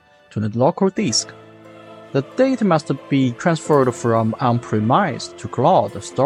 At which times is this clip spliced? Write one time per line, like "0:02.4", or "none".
none